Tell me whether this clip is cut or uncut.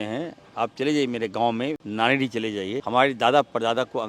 cut